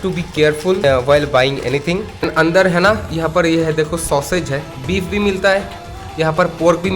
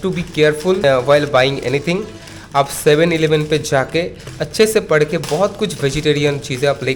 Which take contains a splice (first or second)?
first